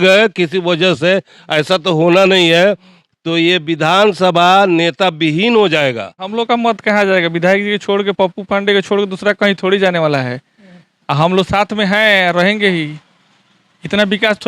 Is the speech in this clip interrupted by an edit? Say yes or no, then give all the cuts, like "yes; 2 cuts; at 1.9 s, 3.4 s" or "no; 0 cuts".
yes; 1 cut; at 6.2 s